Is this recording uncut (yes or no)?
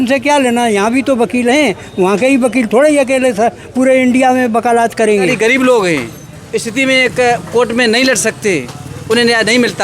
no